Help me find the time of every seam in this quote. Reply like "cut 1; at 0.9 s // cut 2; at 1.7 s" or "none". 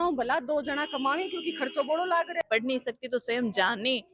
cut 1; at 2.4 s